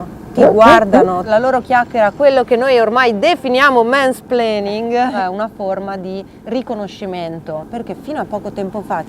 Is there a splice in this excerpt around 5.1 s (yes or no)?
yes